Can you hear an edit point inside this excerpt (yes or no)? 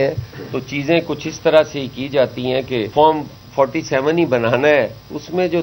yes